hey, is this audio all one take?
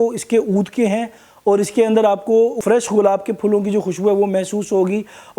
no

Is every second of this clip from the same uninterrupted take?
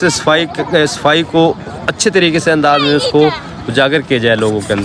yes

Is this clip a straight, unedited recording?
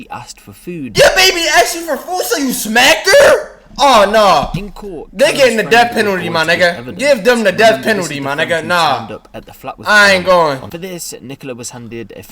no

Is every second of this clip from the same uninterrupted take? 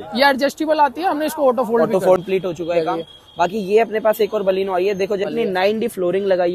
no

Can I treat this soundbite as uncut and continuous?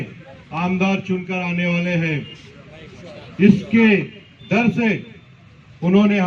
yes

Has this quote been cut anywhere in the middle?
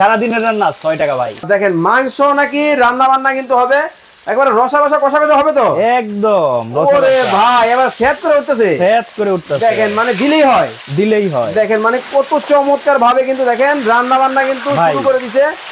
yes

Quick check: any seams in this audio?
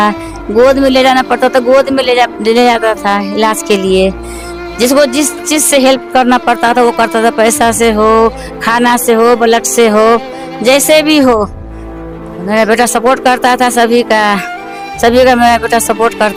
no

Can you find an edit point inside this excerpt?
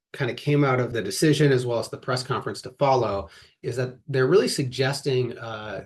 yes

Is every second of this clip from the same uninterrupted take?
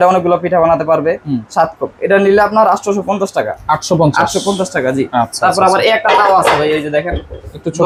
yes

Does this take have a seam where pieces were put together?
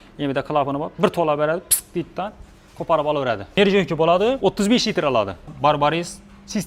yes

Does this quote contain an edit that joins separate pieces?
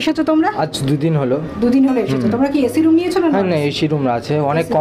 no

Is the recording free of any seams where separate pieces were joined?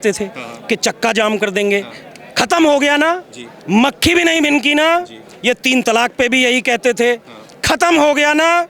yes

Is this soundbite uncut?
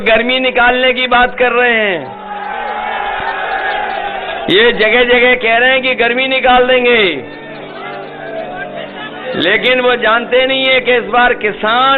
yes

